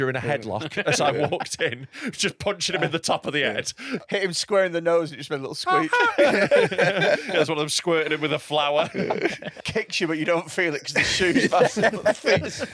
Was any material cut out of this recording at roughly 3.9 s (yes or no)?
yes